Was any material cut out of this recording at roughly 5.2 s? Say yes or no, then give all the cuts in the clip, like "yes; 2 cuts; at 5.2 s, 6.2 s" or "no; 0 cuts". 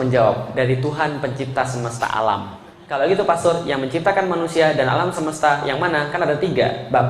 no; 1 cut; at 2.8 s